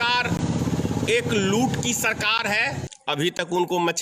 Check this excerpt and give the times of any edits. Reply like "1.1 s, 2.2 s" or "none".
2.9 s